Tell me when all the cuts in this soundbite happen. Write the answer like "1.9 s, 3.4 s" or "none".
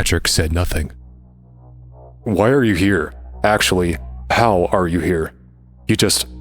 1.5 s